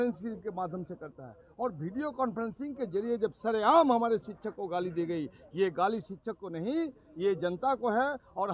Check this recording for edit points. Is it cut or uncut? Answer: uncut